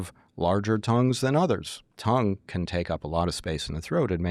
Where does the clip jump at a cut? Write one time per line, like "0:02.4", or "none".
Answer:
0:01.8